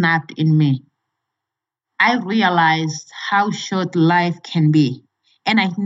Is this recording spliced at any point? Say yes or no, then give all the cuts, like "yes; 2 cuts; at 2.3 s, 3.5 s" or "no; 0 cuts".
no; 0 cuts